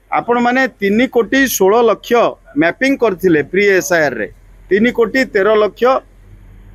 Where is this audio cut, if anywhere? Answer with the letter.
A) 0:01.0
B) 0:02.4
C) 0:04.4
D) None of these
D